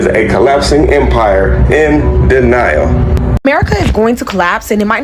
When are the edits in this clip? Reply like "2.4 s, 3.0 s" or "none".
3.3 s

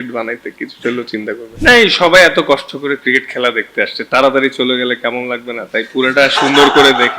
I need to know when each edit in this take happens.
1.5 s

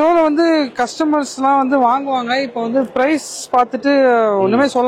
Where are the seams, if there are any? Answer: none

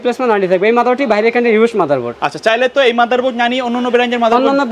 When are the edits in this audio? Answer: none

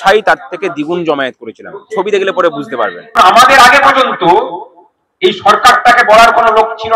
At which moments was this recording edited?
3.2 s

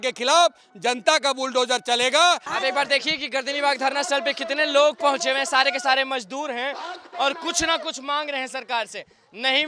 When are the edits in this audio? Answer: 2.5 s

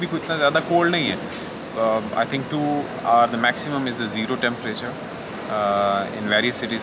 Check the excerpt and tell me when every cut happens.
none

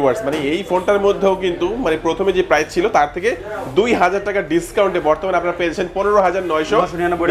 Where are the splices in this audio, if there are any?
none

